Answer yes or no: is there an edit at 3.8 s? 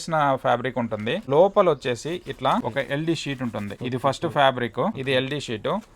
yes